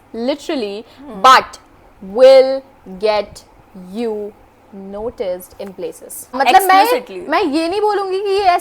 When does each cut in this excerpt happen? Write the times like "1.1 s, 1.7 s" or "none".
6.3 s

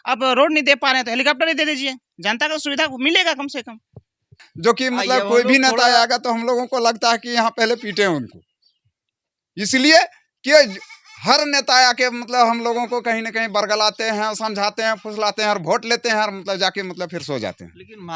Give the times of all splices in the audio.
4.5 s

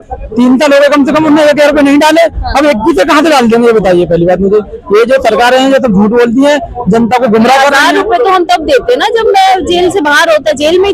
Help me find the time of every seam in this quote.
none

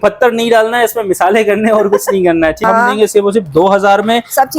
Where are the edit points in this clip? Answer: 2.6 s

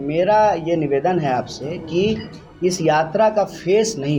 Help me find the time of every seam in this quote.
none

